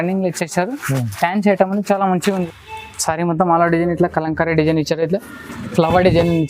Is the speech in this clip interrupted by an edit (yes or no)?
yes